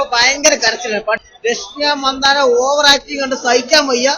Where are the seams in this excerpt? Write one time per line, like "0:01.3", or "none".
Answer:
0:01.2